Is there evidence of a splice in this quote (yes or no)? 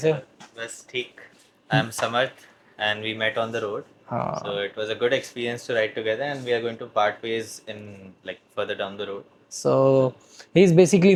no